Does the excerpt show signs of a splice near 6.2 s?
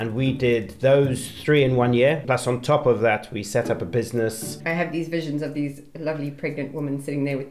no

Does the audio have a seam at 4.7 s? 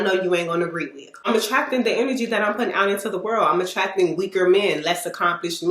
no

